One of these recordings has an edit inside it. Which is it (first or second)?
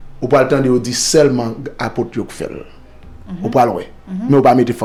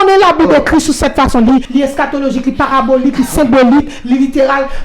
second